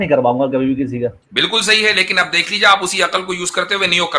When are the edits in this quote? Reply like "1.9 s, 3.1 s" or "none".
1.2 s